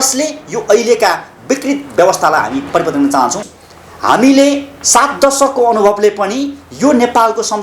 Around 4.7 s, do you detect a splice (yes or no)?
no